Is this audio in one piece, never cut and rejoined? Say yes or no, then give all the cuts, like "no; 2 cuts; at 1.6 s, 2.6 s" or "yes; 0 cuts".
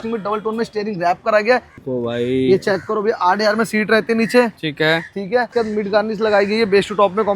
no; 2 cuts; at 1.8 s, 5.5 s